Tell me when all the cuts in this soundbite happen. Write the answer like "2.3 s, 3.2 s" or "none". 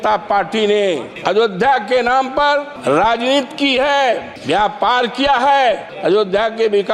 1.1 s, 2.7 s, 4.3 s, 5.9 s

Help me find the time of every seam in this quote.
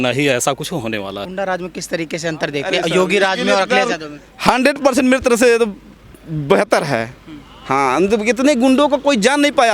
1.3 s

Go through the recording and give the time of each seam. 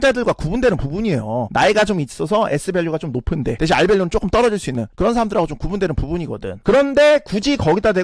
none

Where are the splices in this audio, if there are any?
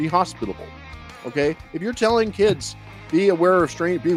none

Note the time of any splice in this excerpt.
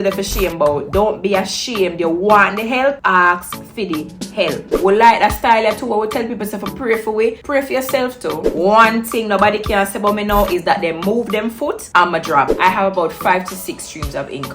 4.7 s, 8.4 s, 12.5 s

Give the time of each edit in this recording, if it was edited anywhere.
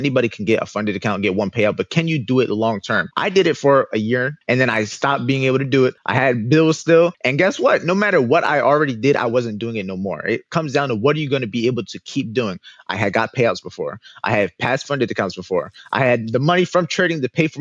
3.1 s, 4.4 s, 6.0 s, 7.2 s

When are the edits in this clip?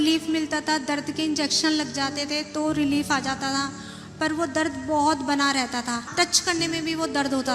6.1 s

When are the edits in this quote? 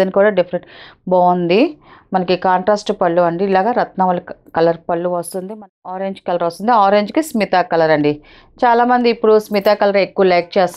5.5 s

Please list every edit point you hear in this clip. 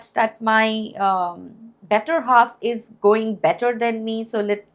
none

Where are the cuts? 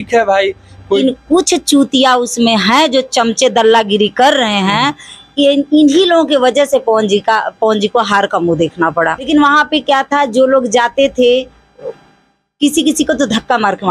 1.0 s, 9.3 s

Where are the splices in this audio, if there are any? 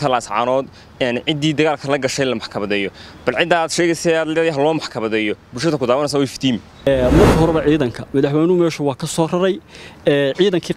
6.9 s

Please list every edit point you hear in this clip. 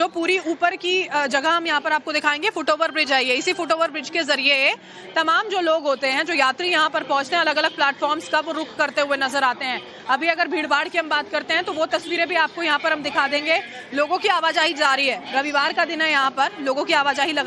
none

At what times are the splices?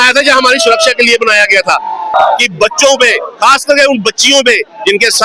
2.1 s

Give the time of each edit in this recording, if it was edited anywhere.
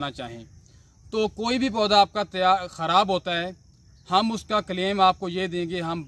none

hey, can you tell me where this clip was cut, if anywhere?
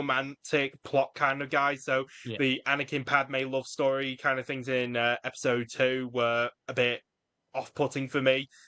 none

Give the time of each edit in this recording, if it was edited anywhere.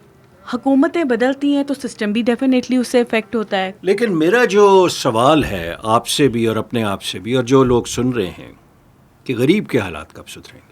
3.7 s

